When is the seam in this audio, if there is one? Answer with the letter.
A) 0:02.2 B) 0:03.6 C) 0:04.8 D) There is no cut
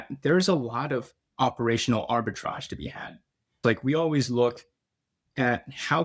B